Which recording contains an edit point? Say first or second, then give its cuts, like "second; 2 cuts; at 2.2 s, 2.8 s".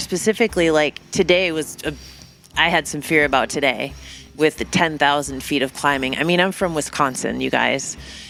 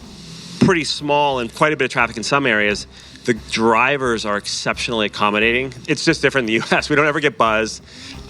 second; 2 cuts; at 1.5 s, 5.7 s